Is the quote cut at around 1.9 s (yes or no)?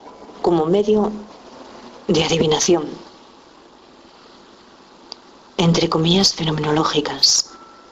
yes